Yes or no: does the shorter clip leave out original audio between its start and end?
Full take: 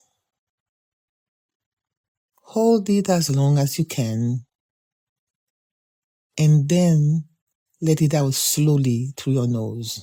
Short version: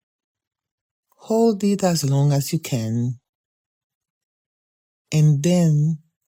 no